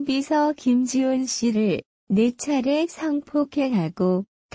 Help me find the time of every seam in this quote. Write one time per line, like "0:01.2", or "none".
0:01.5